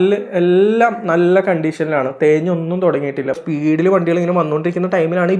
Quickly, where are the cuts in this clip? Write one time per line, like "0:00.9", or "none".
0:03.5